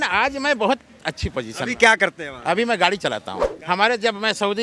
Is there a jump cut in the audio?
yes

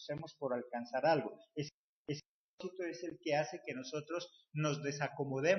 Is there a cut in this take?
yes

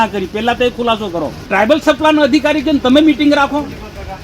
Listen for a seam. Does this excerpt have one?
yes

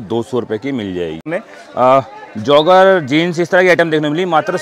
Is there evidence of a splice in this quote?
yes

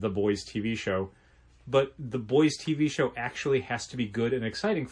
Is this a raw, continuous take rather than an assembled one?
yes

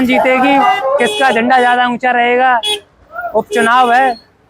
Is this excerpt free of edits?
yes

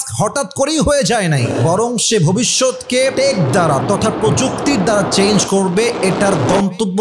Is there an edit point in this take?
yes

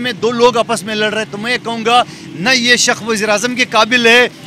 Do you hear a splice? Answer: no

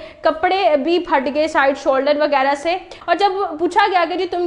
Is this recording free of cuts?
no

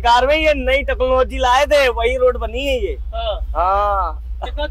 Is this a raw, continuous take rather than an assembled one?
yes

